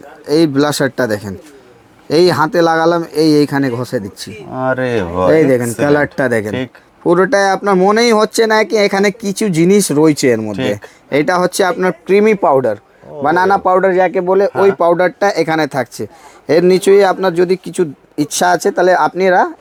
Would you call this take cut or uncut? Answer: uncut